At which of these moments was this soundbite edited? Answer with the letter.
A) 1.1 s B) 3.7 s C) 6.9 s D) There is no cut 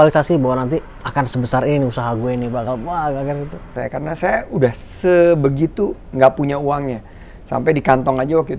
B